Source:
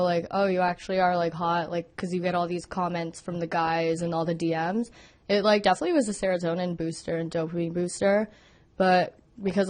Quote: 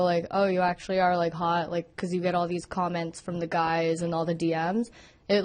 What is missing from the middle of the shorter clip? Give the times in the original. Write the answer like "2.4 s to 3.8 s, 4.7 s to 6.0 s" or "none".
none

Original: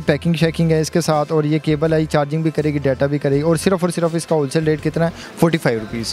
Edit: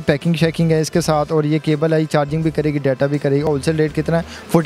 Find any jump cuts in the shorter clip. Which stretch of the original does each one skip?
3.5 s to 4.3 s

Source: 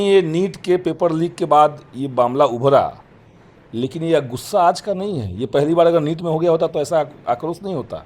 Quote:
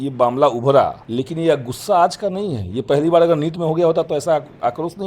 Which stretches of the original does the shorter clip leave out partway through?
3.0 s to 3.7 s

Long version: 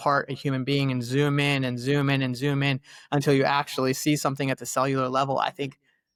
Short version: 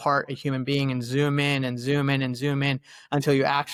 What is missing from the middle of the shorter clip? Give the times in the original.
none

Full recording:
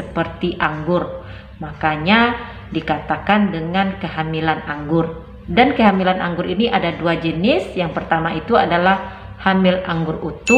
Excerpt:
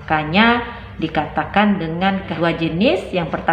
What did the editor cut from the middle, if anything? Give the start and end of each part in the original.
4.1 s to 7.0 s

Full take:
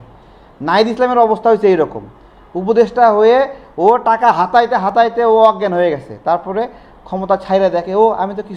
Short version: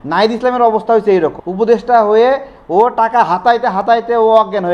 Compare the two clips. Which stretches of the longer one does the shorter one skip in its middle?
2.0 s to 2.5 s

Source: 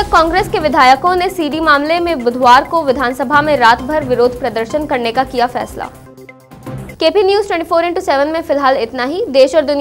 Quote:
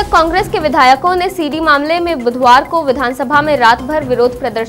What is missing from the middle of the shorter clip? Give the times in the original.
none

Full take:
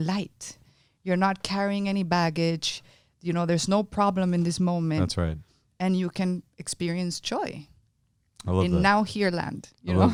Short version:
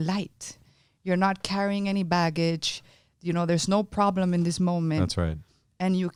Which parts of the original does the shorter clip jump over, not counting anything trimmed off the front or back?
none

